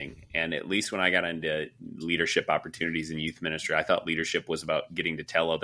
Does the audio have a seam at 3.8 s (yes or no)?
no